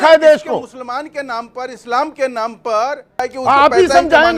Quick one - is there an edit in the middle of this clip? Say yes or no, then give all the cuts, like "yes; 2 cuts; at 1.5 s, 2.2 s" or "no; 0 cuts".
yes; 1 cut; at 3.3 s